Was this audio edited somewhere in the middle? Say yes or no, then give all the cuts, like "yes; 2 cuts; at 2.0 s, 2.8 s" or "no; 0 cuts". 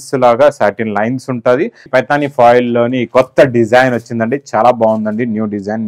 yes; 1 cut; at 1.9 s